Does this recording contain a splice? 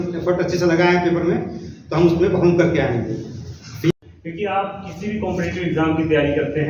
yes; 1 cut; at 3.9 s

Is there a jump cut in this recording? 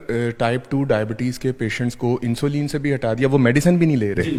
no; 0 cuts

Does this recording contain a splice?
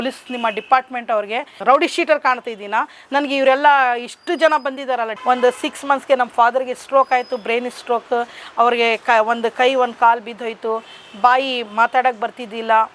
yes; 2 cuts; at 1.5 s, 5.1 s

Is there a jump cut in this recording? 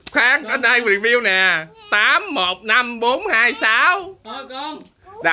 no; 0 cuts

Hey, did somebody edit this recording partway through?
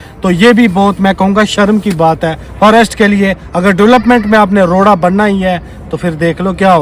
no; 0 cuts

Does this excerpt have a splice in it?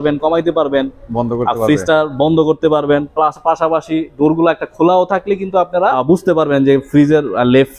no; 0 cuts

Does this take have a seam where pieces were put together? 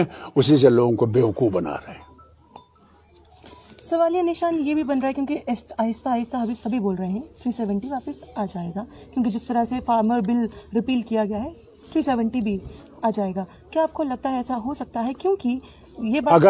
no; 0 cuts

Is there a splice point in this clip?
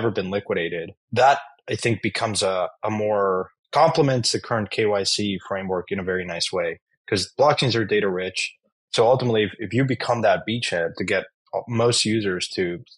yes; 1 cut; at 1.0 s

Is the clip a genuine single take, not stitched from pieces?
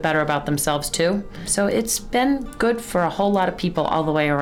no; 1 cut; at 1.5 s

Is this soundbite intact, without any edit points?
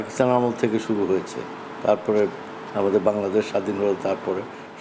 yes; 0 cuts

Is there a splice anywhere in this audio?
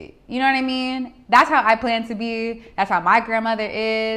no; 0 cuts

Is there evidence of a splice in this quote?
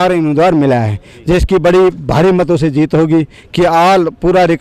no; 0 cuts

